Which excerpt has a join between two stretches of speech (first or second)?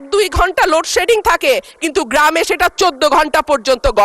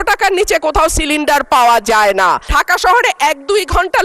second